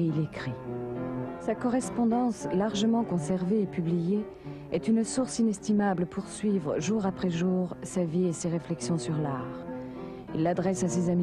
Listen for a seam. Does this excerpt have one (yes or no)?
yes